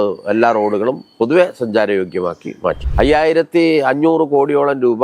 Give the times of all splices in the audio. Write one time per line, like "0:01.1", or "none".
0:02.8